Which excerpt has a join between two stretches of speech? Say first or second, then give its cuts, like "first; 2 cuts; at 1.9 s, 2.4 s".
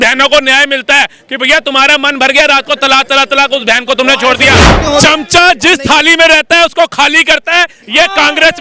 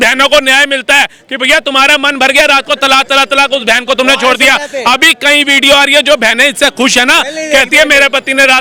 first; 1 cut; at 4.7 s